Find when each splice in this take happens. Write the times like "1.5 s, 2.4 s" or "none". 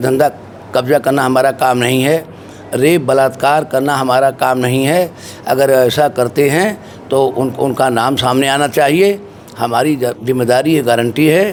none